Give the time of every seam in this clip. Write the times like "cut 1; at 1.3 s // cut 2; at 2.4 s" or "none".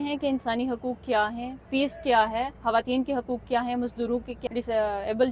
cut 1; at 4.3 s